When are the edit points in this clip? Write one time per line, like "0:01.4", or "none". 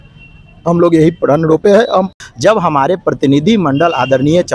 0:02.1